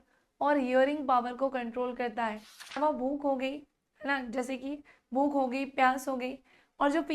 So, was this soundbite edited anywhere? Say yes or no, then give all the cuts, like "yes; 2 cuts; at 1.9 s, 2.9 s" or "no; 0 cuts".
yes; 1 cut; at 2.8 s